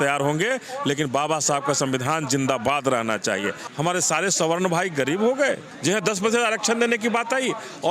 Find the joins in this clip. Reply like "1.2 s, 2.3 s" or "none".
3.6 s, 5.7 s